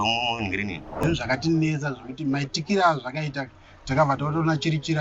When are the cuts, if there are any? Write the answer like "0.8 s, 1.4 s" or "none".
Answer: 0.9 s